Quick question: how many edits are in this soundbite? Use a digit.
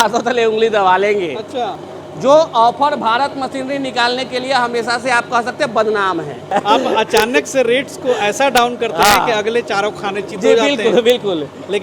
2